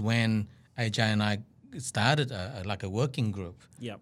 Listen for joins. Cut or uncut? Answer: uncut